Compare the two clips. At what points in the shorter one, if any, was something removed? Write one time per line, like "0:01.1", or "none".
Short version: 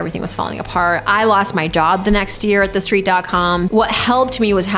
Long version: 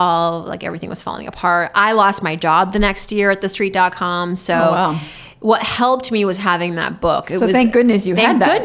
0:03.7